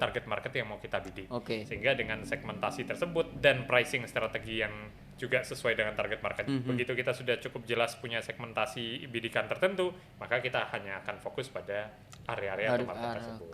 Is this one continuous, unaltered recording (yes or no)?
no